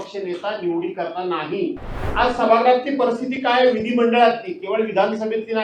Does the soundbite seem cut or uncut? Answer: cut